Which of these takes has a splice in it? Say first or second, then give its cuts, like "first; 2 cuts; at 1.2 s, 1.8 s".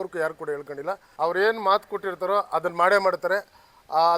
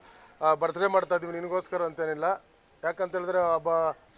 first; 1 cut; at 1.0 s